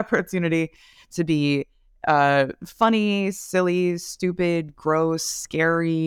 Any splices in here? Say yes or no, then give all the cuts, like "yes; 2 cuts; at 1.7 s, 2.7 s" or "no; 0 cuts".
no; 0 cuts